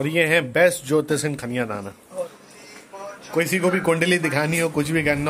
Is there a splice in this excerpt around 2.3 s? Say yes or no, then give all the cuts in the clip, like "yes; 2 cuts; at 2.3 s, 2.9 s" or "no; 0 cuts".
yes; 1 cut; at 2.3 s